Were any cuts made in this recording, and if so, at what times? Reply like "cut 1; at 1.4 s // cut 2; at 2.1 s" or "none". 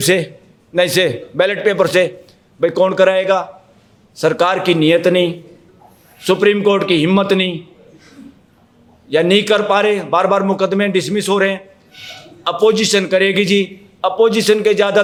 none